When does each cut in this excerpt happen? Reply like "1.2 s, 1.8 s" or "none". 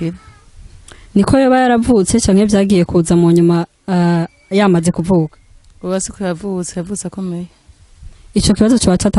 none